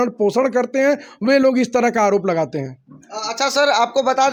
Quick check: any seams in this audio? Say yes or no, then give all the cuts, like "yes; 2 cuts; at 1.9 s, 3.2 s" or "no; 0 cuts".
no; 0 cuts